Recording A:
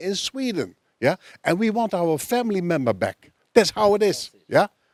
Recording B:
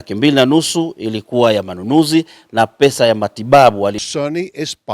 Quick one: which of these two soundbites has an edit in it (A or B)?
B